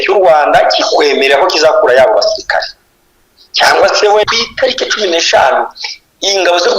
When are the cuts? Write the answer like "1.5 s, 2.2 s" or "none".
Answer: 4.2 s